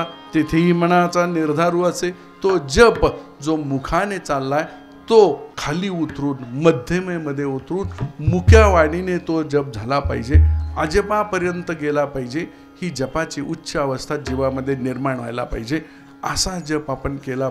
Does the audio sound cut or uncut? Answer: cut